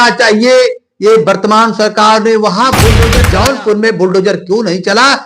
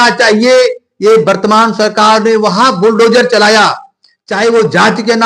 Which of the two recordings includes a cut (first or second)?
first